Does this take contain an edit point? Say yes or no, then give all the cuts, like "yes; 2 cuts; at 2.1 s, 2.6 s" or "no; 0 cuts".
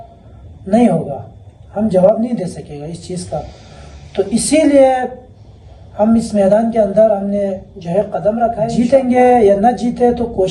yes; 1 cut; at 8.7 s